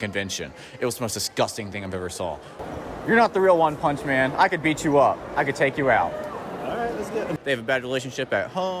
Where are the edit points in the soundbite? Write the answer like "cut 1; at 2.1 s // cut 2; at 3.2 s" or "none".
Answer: cut 1; at 2.6 s // cut 2; at 7.4 s